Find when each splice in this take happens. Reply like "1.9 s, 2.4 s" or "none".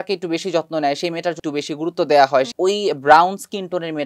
1.4 s, 2.5 s